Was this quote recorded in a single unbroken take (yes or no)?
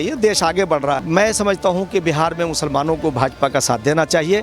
no